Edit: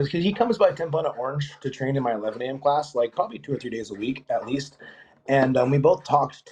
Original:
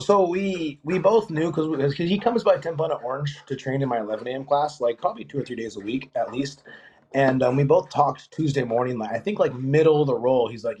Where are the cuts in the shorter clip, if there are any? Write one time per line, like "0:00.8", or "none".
none